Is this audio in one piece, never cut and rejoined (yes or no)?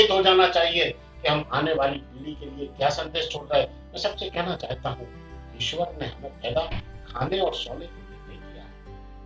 yes